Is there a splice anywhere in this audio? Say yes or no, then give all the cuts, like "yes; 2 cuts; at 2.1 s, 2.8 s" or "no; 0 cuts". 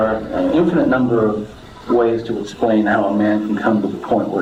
no; 0 cuts